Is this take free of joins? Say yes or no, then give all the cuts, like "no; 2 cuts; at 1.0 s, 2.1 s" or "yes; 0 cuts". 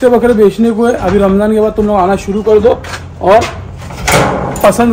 yes; 0 cuts